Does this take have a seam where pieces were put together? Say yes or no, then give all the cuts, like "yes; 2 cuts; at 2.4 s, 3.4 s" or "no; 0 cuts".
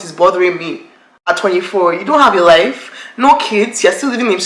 no; 0 cuts